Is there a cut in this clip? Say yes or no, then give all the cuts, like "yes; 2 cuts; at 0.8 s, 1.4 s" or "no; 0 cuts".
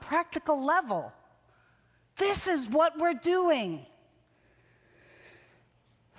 no; 0 cuts